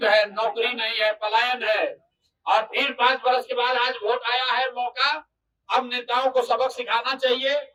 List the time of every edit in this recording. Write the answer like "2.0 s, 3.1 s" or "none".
none